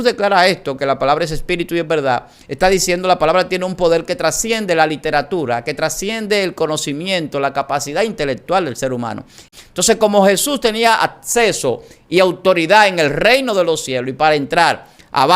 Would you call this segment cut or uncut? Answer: cut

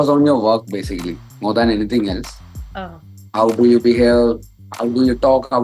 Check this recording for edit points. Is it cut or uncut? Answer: uncut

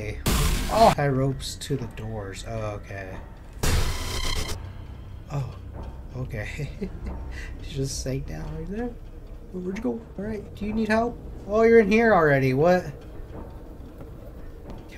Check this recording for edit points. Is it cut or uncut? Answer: cut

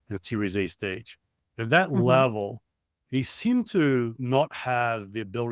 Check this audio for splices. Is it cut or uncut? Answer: cut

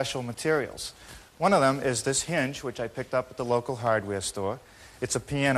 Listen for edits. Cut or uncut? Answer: uncut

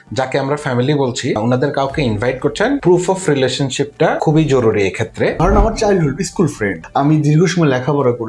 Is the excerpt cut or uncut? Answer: cut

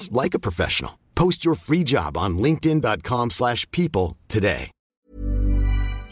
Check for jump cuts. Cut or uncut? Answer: cut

